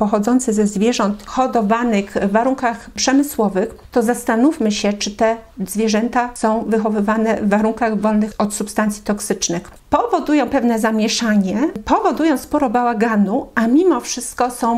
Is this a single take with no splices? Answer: no; 5 cuts; at 1.2 s, 3.8 s, 6.3 s, 8.3 s, 9.7 s

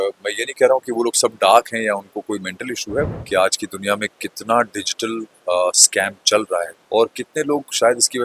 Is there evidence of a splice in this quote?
yes; 2 cuts; at 3.1 s, 6.8 s

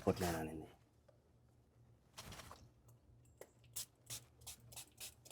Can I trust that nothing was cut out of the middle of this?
yes; 0 cuts

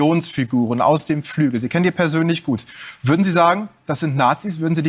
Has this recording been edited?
no; 0 cuts

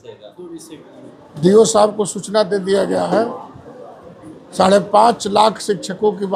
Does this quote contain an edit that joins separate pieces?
no; 0 cuts

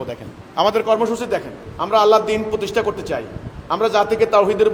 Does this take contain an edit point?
no; 0 cuts

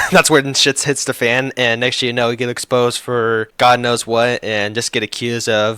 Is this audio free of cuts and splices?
no; 1 cut; at 3.5 s

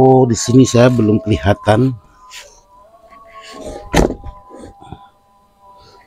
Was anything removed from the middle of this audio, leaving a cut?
no; 0 cuts

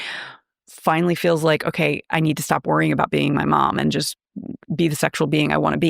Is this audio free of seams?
yes; 0 cuts

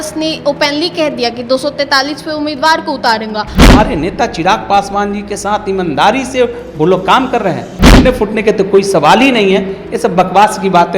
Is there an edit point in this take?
yes; 2 cuts; at 3.7 s, 7.9 s

